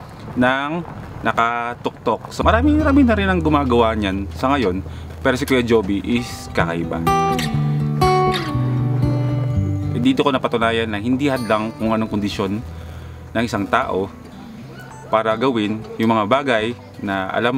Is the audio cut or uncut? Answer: cut